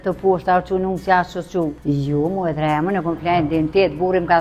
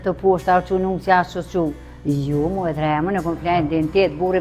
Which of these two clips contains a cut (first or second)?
first